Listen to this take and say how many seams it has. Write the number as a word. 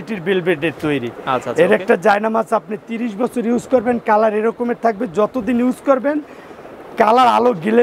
zero